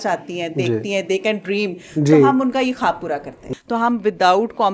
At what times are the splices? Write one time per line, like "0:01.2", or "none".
0:03.3